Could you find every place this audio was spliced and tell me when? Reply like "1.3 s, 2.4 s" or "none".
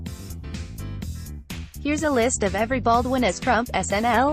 1.7 s